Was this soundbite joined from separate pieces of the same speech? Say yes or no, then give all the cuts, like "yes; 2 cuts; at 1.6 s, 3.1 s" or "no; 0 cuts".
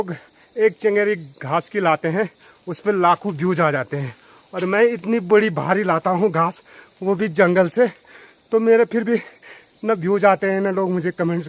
no; 0 cuts